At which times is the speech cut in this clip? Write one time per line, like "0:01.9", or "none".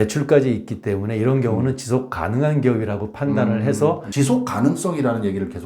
0:04.0